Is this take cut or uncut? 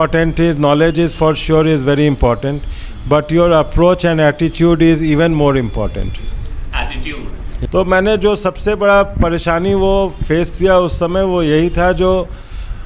cut